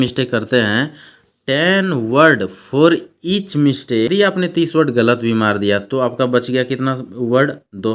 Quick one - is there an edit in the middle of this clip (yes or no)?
yes